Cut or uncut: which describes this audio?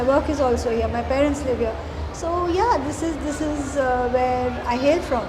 uncut